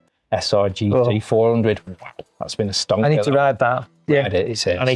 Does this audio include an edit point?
no; 0 cuts

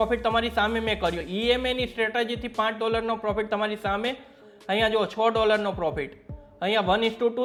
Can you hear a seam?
no; 0 cuts

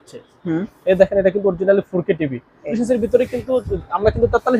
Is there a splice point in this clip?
yes; 1 cut; at 2.7 s

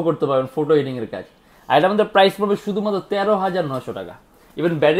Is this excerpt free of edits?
yes; 0 cuts

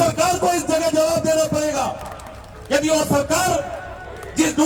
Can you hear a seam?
no; 0 cuts

